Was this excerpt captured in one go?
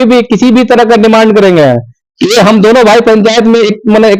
yes; 0 cuts

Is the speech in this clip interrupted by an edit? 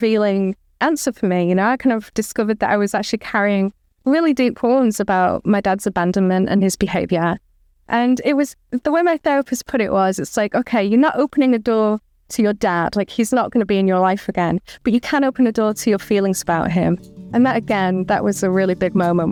no; 0 cuts

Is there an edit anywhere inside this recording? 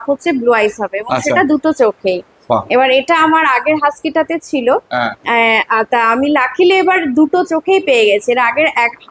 no; 0 cuts

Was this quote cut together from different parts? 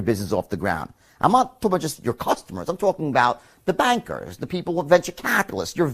no; 0 cuts

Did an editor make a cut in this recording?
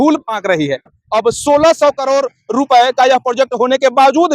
yes; 1 cut; at 1.0 s

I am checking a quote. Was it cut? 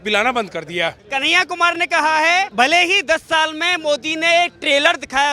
yes; 2 cuts; at 1.0 s, 2.5 s

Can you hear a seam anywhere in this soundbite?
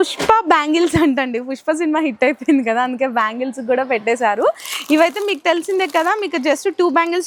no; 0 cuts

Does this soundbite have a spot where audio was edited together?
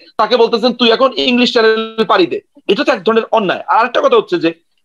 no; 0 cuts

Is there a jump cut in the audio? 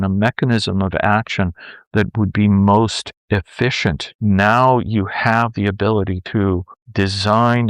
yes; 1 cut; at 4.1 s

